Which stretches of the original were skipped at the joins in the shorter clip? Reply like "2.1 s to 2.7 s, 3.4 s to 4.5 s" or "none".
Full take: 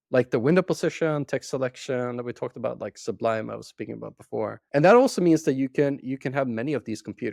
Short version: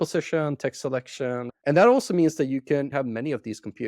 2.2 s to 4.6 s, 6.0 s to 6.3 s